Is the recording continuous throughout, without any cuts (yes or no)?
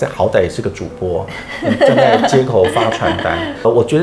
yes